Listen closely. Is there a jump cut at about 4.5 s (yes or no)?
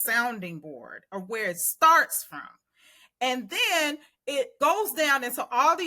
yes